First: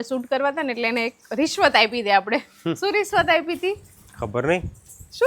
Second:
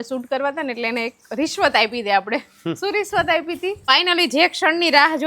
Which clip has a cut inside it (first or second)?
second